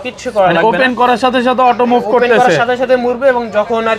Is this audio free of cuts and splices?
yes; 0 cuts

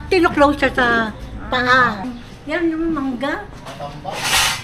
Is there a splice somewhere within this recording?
yes; 1 cut; at 2.0 s

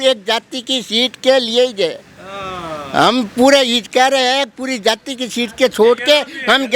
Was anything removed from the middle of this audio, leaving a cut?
no; 0 cuts

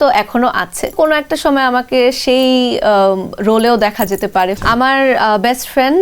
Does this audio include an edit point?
yes; 2 cuts; at 0.9 s, 4.6 s

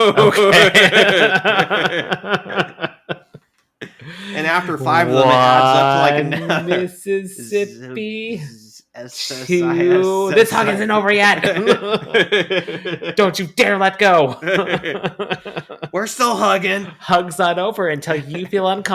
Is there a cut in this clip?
yes; 1 cut; at 16.9 s

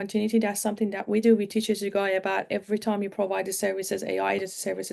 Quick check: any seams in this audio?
no; 0 cuts

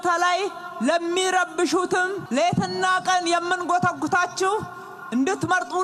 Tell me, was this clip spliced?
yes; 1 cut; at 2.2 s

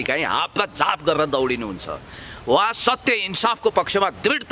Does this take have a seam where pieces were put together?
no; 0 cuts

